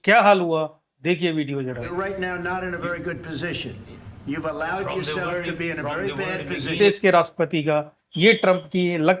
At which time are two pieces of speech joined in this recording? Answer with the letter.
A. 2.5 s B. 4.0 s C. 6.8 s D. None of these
C